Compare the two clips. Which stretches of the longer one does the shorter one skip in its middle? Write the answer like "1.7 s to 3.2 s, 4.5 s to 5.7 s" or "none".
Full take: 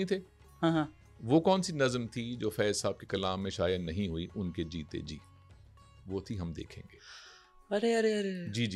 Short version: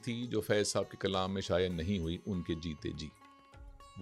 none